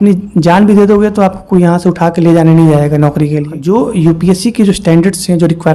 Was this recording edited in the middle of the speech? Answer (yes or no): yes